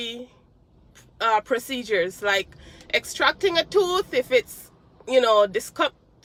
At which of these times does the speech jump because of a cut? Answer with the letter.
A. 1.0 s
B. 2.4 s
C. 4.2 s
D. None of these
D